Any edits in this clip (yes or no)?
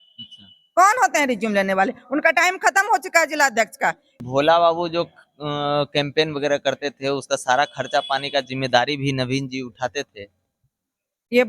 yes